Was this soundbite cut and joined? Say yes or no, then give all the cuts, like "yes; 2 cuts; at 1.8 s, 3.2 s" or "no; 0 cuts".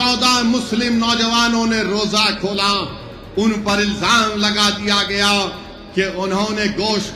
no; 0 cuts